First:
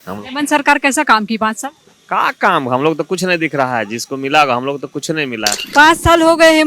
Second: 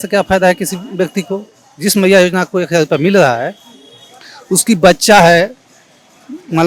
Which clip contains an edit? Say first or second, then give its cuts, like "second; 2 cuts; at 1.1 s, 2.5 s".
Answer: first; 1 cut; at 5.6 s